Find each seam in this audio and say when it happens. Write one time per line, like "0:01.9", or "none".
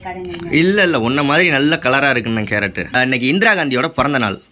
0:02.9